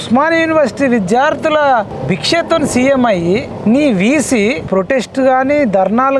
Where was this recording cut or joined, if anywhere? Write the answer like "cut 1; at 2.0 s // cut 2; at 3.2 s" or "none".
cut 1; at 1.9 s // cut 2; at 3.5 s // cut 3; at 4.7 s